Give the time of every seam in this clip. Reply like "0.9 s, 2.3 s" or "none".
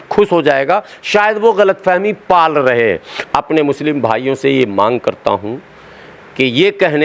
3.1 s

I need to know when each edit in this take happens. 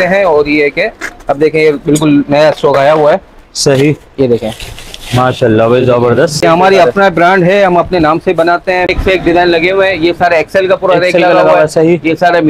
6.4 s, 8.9 s

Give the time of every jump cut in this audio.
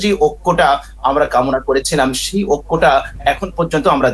none

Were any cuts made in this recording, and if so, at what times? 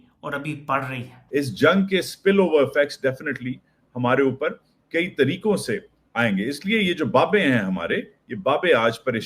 1.3 s

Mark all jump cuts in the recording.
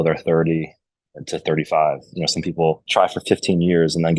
2.8 s

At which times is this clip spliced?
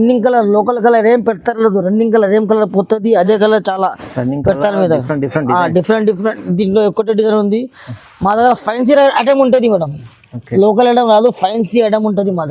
none

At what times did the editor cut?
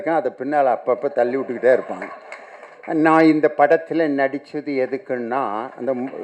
none

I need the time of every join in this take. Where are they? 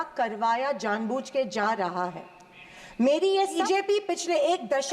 3.6 s

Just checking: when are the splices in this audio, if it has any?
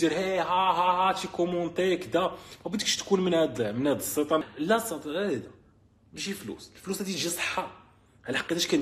4.4 s

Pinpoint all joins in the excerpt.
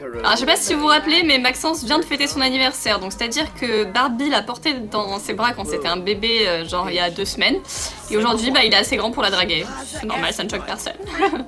3.3 s

